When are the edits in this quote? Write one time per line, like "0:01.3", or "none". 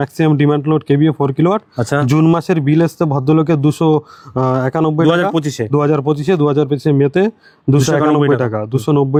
none